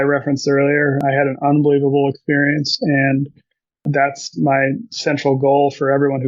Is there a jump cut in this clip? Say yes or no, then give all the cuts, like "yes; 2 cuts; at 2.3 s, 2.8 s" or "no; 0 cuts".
yes; 2 cuts; at 1.0 s, 3.8 s